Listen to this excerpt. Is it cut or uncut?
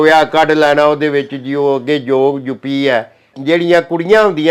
cut